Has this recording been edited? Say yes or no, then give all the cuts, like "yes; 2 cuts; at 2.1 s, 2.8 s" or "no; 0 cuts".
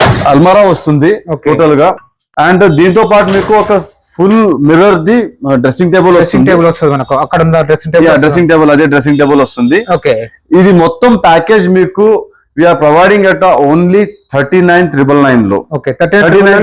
no; 0 cuts